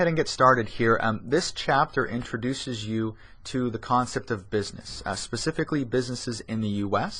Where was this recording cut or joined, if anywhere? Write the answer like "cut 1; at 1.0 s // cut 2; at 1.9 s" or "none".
cut 1; at 1.2 s